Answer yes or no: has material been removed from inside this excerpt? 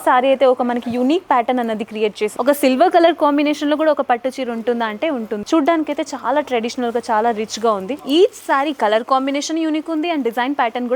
yes